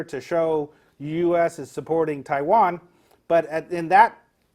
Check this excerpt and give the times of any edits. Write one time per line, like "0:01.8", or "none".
none